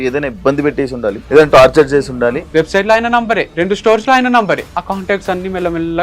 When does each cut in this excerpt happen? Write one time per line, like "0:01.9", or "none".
0:01.2
0:02.4
0:03.5
0:04.7